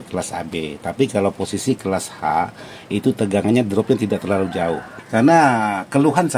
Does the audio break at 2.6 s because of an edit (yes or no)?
no